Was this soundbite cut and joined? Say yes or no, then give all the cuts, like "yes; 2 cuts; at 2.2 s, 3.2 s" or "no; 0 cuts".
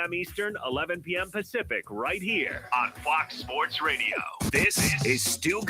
yes; 1 cut; at 4.3 s